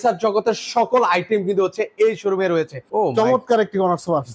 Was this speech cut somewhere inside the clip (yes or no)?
yes